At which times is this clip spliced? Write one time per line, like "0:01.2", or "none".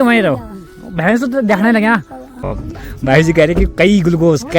0:02.6